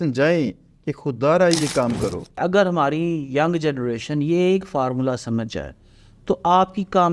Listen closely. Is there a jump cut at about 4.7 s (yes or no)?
no